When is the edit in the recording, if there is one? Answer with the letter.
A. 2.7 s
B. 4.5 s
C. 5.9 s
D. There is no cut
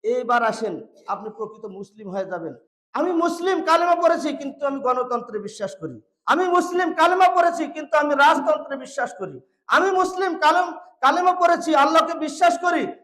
A